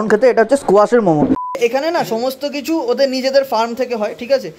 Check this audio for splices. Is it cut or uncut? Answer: cut